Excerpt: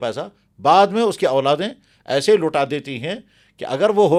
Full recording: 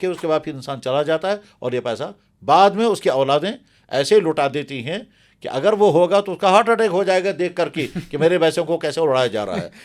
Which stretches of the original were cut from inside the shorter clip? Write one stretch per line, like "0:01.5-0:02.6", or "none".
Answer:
none